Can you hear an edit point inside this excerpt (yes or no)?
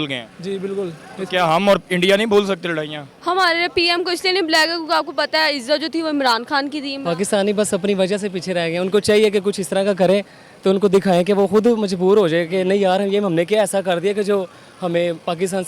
yes